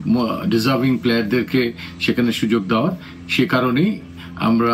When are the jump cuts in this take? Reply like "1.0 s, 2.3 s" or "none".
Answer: none